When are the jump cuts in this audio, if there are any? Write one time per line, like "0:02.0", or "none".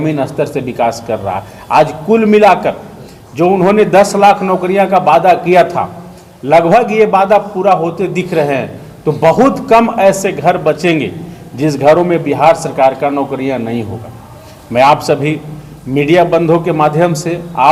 none